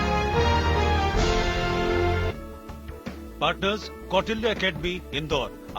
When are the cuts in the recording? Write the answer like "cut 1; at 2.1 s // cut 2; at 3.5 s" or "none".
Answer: cut 1; at 1.2 s